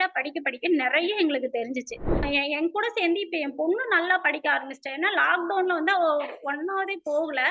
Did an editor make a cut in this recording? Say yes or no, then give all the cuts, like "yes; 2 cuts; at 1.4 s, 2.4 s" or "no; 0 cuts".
yes; 1 cut; at 2.2 s